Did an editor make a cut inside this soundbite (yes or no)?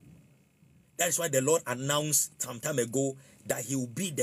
no